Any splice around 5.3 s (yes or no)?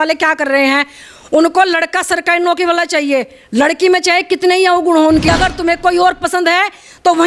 yes